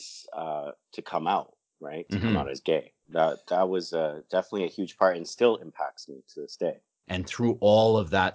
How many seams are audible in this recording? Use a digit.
2